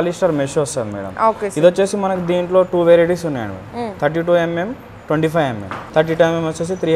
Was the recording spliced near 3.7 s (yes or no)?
no